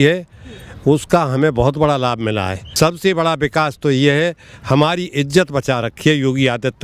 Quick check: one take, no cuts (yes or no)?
no